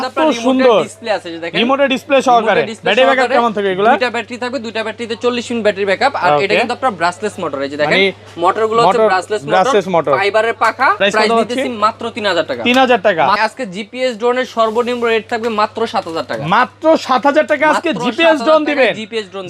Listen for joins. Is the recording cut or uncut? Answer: cut